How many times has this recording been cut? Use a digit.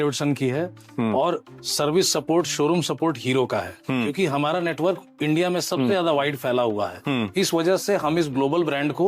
0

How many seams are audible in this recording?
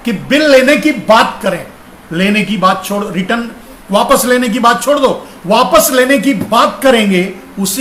0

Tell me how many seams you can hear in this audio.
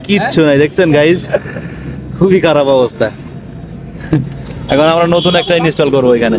0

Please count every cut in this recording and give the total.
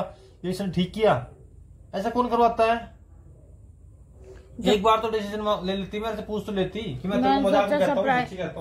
0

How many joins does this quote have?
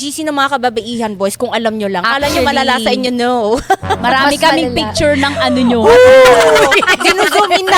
0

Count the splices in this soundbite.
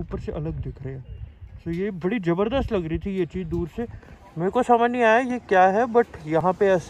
0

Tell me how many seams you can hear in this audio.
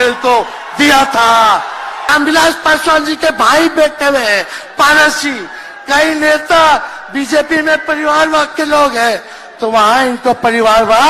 1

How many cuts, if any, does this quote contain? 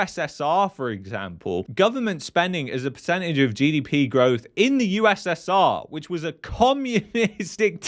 0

